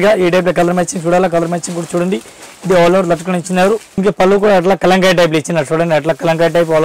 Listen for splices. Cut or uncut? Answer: cut